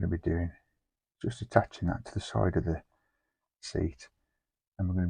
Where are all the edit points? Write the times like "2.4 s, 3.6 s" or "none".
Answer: none

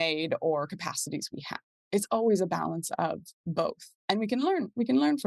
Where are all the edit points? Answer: 3.9 s

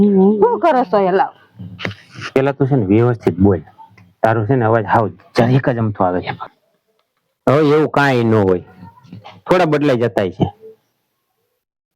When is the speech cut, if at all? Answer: 6.5 s

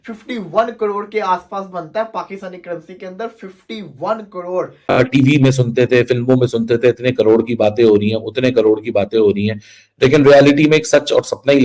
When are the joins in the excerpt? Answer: 5.0 s

